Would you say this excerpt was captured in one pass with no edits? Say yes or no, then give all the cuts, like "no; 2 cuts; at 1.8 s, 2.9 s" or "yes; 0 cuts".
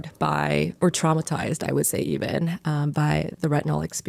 yes; 0 cuts